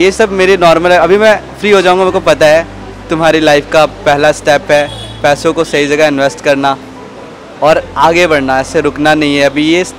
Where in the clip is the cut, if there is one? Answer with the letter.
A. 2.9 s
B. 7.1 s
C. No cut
A